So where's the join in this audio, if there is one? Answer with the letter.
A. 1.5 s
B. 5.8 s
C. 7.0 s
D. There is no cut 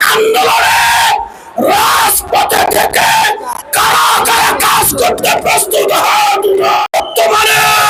D